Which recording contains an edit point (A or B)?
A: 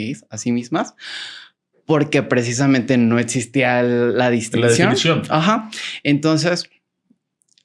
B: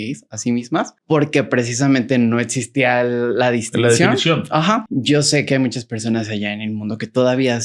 B